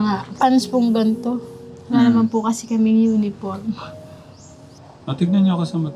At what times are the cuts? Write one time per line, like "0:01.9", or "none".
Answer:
0:04.7